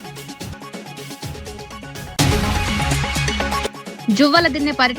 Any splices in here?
no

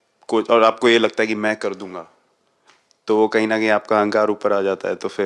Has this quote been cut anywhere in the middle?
no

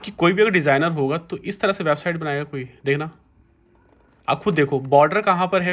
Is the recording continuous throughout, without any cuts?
yes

